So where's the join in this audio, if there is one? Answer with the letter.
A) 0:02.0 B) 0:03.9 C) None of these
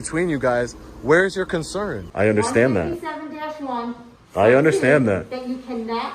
A